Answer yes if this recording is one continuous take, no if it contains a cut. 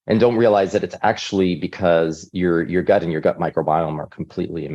yes